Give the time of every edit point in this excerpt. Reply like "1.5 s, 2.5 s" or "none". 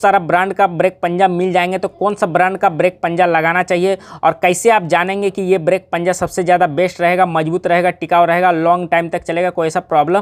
none